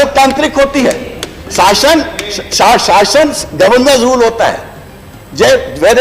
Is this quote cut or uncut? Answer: uncut